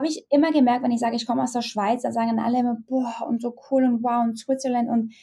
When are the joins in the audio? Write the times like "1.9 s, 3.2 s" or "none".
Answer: none